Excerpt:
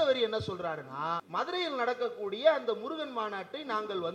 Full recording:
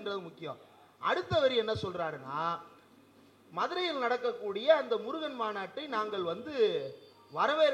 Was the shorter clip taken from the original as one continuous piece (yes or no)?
no